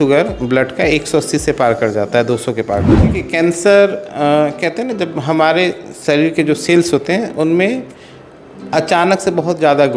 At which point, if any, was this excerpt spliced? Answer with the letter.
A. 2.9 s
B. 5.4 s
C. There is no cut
A